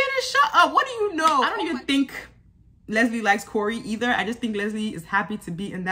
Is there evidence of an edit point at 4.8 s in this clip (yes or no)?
no